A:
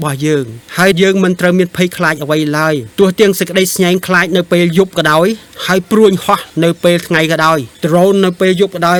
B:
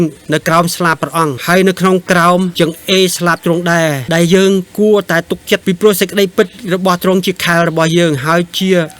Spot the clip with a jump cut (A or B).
B